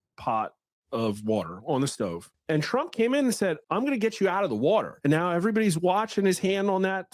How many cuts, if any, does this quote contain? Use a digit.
3